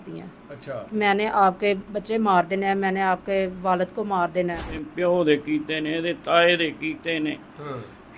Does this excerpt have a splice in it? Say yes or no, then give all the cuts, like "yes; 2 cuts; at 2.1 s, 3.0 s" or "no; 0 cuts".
yes; 1 cut; at 4.9 s